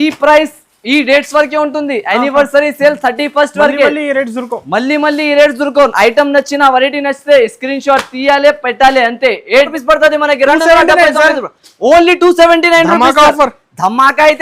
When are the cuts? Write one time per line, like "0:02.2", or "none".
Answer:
0:09.7